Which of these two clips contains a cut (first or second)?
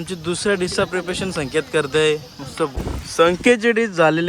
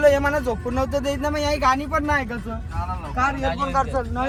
first